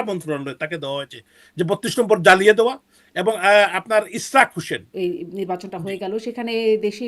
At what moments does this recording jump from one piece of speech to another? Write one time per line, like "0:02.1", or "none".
0:04.9